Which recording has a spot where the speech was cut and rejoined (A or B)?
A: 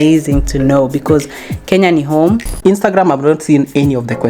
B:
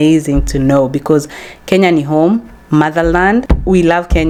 A